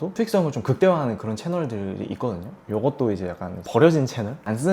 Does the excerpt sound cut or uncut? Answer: uncut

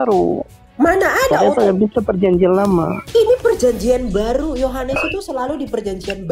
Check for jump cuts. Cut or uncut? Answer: cut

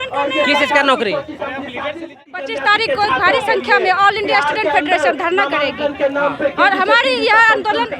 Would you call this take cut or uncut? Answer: cut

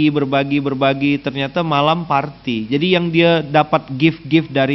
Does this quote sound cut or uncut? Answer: uncut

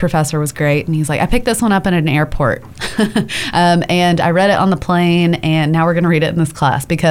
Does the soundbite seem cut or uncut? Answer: uncut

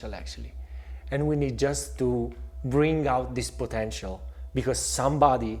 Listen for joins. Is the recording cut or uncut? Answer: uncut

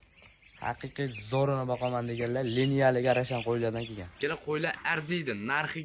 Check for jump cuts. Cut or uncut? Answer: cut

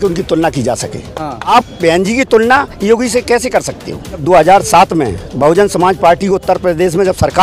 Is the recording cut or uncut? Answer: cut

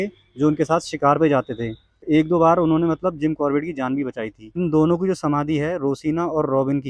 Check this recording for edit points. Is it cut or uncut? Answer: uncut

